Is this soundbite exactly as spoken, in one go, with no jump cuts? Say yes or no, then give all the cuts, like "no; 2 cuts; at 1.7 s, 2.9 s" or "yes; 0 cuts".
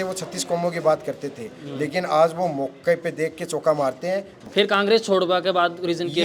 no; 1 cut; at 4.4 s